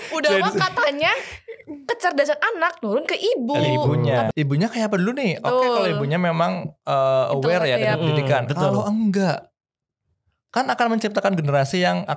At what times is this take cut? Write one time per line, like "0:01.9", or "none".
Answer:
0:04.3